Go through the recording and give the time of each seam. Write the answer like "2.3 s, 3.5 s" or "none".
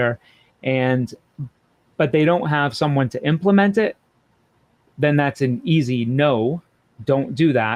none